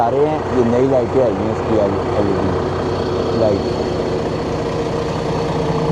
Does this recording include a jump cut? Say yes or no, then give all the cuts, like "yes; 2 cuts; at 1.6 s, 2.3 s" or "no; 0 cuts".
no; 0 cuts